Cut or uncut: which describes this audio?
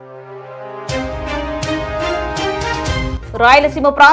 cut